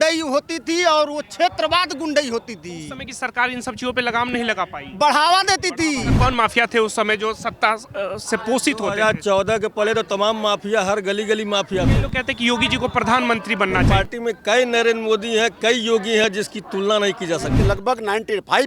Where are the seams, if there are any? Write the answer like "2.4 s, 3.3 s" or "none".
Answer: 6.1 s, 11.9 s, 13.9 s, 17.6 s